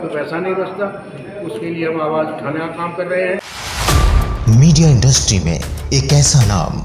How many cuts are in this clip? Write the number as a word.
one